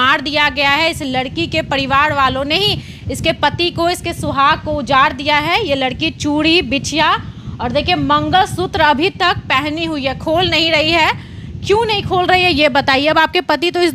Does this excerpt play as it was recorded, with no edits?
yes; 0 cuts

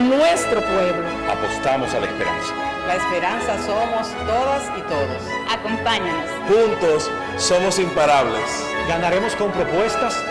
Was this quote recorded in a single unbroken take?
yes; 0 cuts

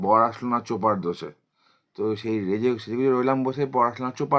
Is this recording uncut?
yes; 0 cuts

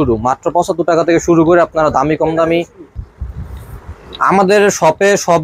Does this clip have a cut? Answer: yes; 1 cut; at 2.8 s

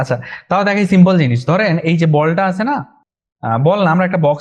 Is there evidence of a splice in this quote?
no; 0 cuts

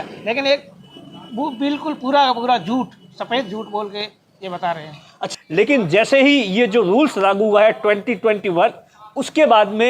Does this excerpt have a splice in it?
yes; 1 cut; at 5.2 s

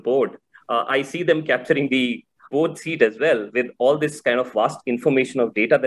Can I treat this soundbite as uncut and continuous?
no; 1 cut; at 2.5 s

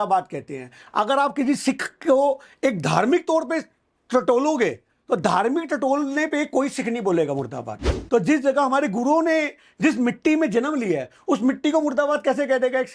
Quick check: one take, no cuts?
no; 1 cut; at 7.9 s

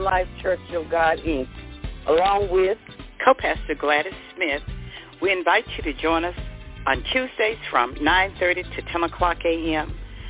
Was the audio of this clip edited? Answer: no; 0 cuts

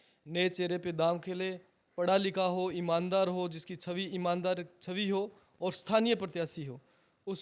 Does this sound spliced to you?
no; 0 cuts

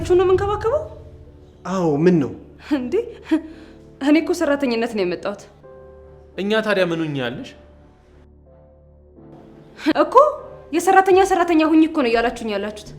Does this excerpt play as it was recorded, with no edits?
no; 1 cut; at 9.9 s

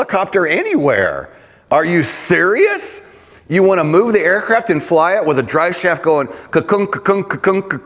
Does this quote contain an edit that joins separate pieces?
no; 0 cuts

